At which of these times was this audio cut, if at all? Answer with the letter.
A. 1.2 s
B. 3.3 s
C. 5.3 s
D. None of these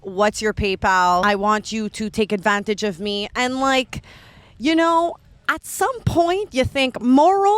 A